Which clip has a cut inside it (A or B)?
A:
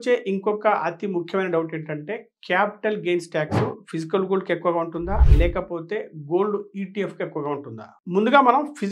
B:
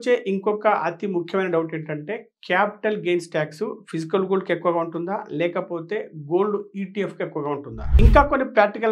B